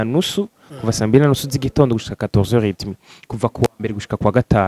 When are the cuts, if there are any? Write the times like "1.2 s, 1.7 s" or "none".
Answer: none